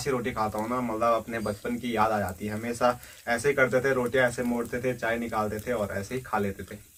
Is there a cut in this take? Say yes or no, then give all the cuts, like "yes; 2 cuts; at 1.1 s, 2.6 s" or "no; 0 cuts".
no; 0 cuts